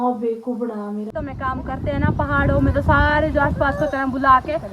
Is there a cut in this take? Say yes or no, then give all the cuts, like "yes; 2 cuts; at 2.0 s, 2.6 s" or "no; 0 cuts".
yes; 1 cut; at 1.1 s